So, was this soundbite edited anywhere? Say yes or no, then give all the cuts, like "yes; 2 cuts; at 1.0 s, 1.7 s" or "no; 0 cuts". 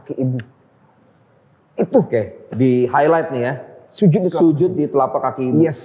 no; 0 cuts